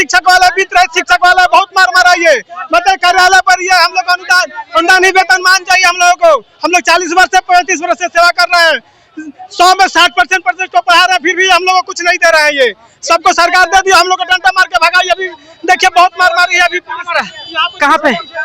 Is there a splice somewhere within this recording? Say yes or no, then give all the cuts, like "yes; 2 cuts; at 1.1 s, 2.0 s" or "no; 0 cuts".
no; 0 cuts